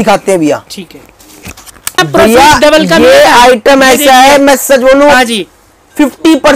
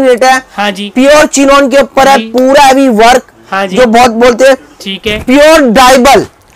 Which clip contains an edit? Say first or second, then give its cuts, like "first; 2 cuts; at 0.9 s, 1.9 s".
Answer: first; 1 cut; at 2.0 s